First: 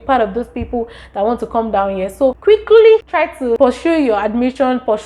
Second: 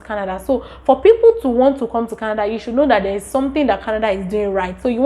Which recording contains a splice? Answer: first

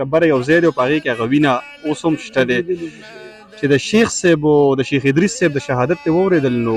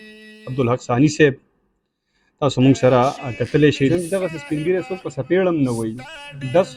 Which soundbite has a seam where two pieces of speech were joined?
second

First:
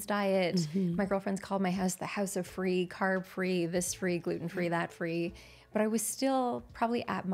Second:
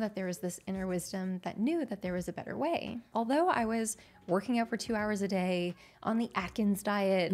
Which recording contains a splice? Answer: second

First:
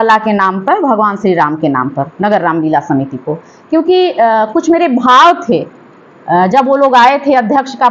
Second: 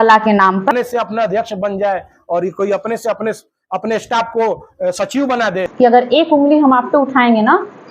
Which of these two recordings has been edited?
second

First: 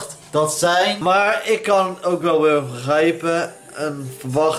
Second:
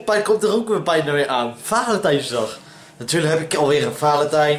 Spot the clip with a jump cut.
first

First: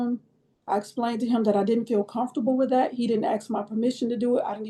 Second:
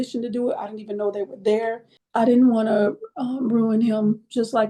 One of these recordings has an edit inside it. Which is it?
second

